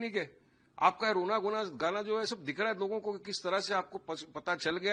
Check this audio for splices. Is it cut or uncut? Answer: uncut